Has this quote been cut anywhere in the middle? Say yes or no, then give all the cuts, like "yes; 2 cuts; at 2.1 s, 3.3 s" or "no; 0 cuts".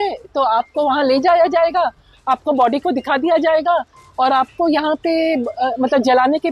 no; 0 cuts